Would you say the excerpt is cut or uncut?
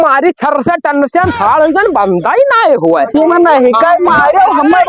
cut